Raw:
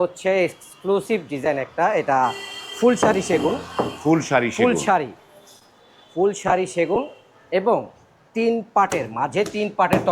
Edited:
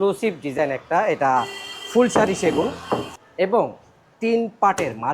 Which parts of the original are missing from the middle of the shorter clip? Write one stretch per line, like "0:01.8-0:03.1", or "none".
0:03.9-0:07.2